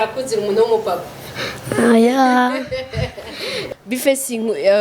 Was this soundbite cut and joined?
yes; 1 cut; at 3.6 s

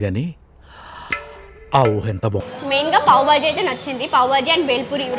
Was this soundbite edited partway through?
yes; 1 cut; at 2.5 s

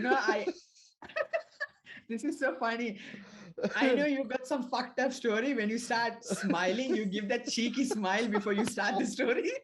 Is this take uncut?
yes; 0 cuts

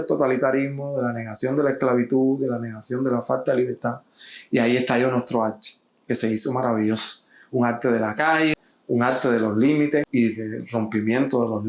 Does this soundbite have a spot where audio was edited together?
yes; 1 cut; at 8.7 s

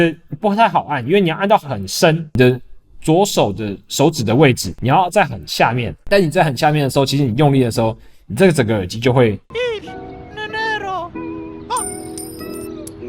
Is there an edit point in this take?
yes; 3 cuts; at 2.3 s, 4.7 s, 5.9 s

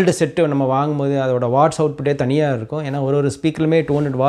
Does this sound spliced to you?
no; 0 cuts

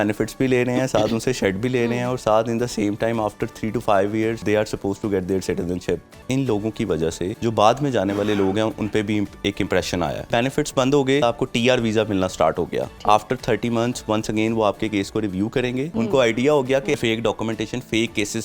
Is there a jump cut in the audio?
yes; 8 cuts; at 4.4 s, 6.1 s, 7.3 s, 10.3 s, 11.2 s, 12.9 s, 15.9 s, 16.9 s

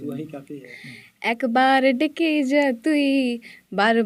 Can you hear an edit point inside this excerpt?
no; 0 cuts

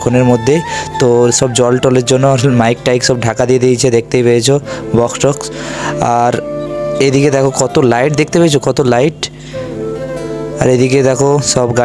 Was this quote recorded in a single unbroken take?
yes; 0 cuts

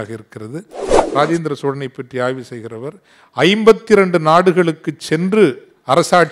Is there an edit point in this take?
yes; 1 cut; at 1.0 s

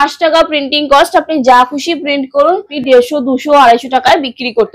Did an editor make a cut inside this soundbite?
yes; 1 cut; at 2.7 s

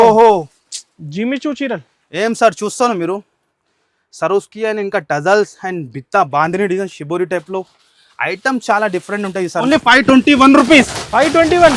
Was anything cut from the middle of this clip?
yes; 1 cut; at 9.6 s

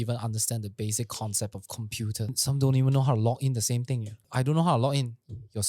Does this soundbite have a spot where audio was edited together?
yes; 2 cuts; at 2.3 s, 4.2 s

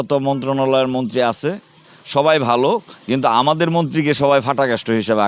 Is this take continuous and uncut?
yes; 0 cuts

